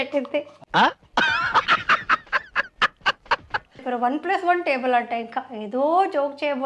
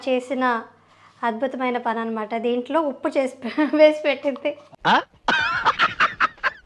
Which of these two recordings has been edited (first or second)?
first